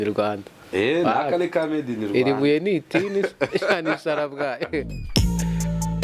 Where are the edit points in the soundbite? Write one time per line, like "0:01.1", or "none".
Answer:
0:05.1